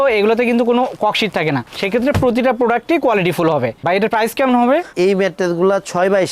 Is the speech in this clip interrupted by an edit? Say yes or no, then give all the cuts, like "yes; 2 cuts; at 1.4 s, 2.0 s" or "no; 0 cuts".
no; 0 cuts